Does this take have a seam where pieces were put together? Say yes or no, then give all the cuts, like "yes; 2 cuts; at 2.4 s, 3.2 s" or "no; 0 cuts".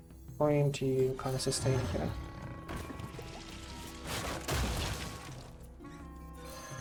no; 0 cuts